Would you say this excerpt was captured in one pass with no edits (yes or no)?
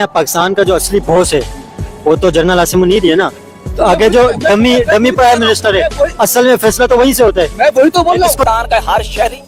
yes